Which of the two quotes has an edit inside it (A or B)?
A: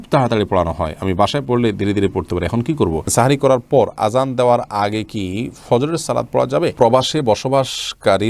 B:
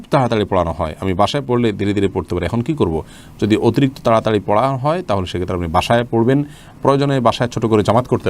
A